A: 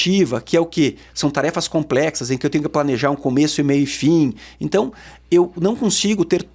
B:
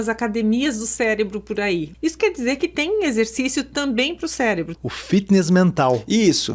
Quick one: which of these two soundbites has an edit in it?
B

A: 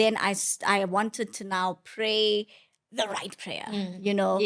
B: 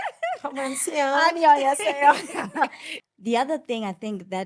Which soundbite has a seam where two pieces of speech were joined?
B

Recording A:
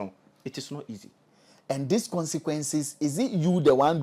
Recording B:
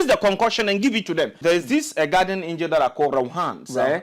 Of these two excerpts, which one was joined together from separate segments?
B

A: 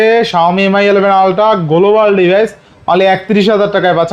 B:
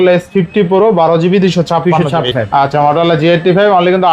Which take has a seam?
B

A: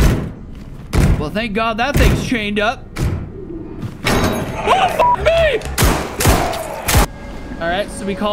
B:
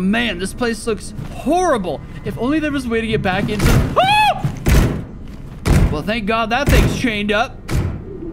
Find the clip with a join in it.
A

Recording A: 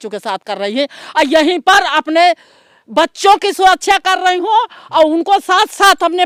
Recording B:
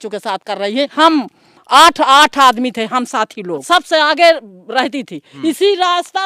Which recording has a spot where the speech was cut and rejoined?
B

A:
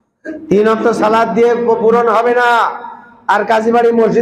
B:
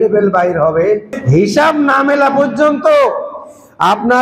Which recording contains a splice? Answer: B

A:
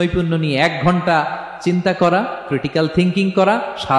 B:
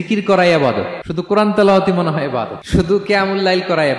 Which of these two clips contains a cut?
B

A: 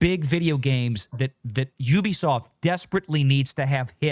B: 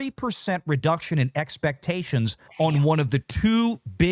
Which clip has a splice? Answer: B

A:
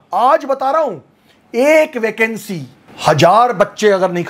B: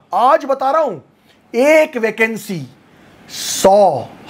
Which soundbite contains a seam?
A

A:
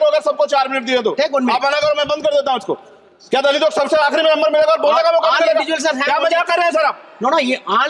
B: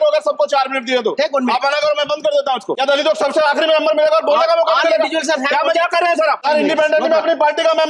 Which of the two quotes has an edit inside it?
B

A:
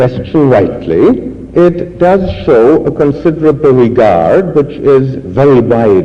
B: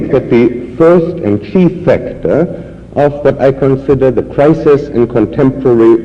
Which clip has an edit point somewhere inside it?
B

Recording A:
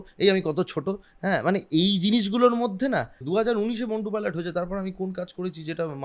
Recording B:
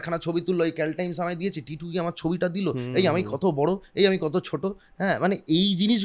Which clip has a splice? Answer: A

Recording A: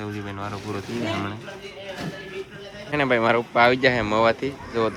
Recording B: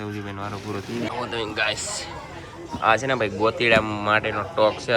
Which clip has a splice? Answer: B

